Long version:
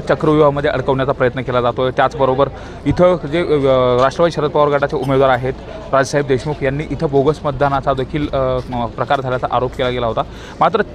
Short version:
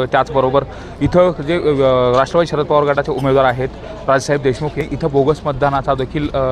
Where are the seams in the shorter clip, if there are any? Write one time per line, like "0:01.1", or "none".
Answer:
0:04.8